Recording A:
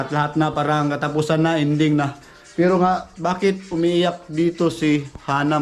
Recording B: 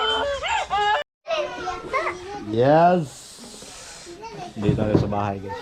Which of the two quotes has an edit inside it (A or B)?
B